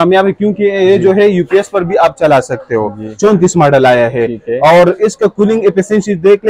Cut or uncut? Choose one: cut